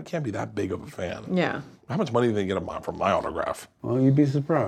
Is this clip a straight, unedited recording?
no; 1 cut; at 3.7 s

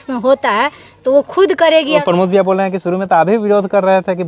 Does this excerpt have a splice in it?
yes; 1 cut; at 2.0 s

